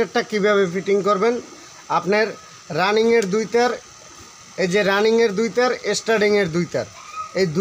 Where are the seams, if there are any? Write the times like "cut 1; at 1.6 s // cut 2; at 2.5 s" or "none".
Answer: none